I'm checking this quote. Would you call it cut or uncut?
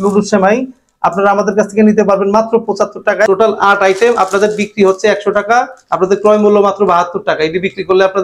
uncut